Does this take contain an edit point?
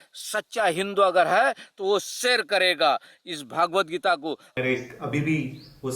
yes; 1 cut; at 4.5 s

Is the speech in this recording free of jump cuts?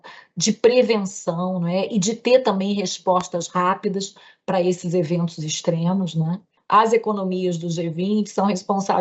no; 1 cut; at 6.5 s

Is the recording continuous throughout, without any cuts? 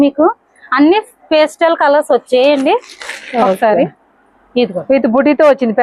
yes; 0 cuts

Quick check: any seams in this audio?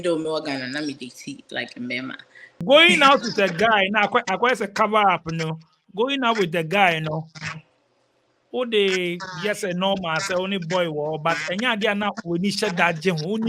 yes; 1 cut; at 2.5 s

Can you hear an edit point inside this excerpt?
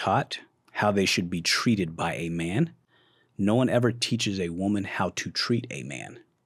no; 0 cuts

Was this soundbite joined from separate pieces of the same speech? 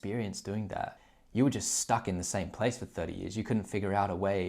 yes; 1 cut; at 0.9 s

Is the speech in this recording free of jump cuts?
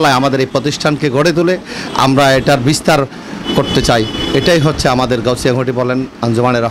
yes; 0 cuts

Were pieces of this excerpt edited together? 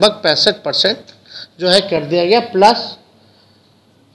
no; 0 cuts

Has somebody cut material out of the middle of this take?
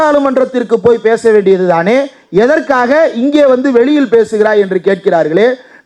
no; 0 cuts

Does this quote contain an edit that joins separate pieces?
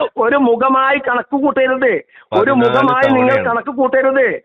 no; 0 cuts

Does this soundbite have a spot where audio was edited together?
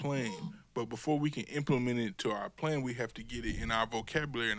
no; 0 cuts

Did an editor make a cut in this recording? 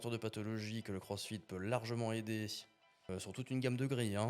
yes; 1 cut; at 3.1 s

